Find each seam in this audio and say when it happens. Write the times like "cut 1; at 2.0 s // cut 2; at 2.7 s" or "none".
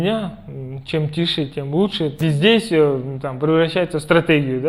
cut 1; at 2.2 s